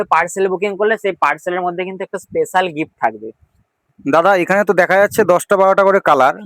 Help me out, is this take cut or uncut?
uncut